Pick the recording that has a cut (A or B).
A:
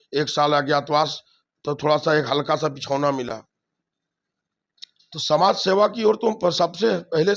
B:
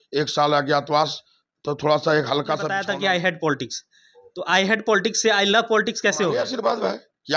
B